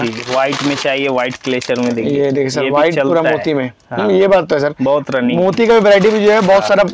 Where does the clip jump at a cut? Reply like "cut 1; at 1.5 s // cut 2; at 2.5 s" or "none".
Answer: none